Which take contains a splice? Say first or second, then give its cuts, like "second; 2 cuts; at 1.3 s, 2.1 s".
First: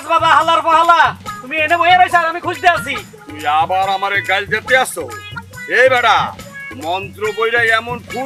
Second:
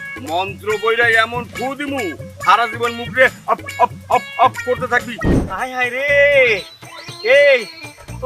second; 1 cut; at 5.3 s